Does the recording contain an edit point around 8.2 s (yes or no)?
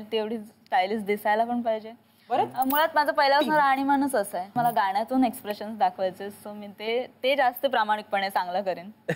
no